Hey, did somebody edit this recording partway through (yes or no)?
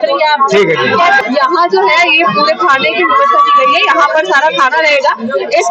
yes